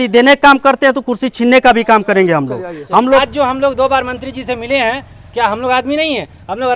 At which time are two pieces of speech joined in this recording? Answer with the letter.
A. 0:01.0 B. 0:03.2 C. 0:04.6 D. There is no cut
B